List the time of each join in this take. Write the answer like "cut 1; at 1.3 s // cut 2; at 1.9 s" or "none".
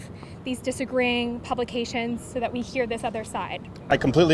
none